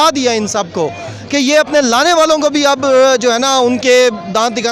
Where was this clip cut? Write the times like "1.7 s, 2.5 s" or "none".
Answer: none